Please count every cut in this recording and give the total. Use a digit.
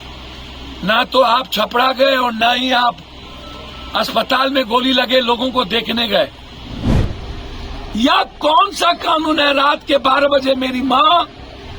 1